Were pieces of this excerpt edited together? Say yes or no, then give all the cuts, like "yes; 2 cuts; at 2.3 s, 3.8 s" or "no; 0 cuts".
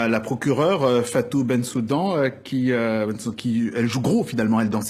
no; 0 cuts